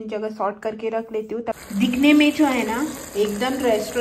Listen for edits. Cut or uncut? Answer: cut